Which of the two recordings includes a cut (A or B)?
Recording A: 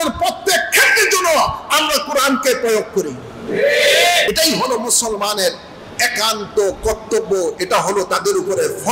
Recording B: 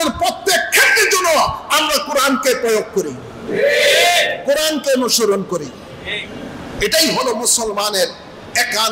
A